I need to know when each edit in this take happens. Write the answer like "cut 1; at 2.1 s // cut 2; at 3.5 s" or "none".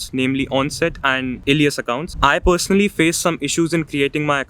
cut 1; at 1.4 s // cut 2; at 2.1 s